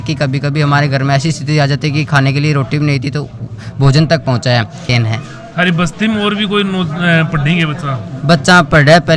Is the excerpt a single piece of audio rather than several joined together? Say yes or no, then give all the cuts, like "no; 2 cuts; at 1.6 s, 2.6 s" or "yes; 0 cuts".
no; 1 cut; at 4.9 s